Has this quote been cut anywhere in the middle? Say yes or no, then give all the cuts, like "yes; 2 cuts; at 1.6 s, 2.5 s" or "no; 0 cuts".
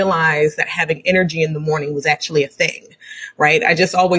no; 0 cuts